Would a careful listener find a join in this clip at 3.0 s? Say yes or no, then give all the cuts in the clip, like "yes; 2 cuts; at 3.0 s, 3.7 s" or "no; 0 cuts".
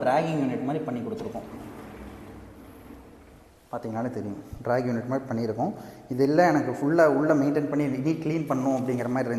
no; 0 cuts